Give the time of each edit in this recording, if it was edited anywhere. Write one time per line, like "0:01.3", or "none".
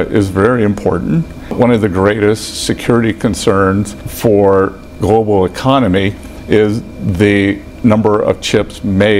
0:01.5
0:04.0
0:04.9
0:07.7